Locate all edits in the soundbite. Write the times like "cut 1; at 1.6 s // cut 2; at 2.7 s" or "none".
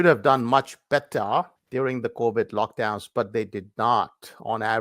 cut 1; at 1.6 s